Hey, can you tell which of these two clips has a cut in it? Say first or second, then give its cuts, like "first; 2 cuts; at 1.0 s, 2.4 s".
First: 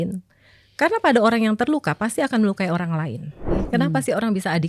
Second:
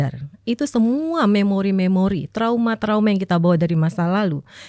first; 1 cut; at 3.6 s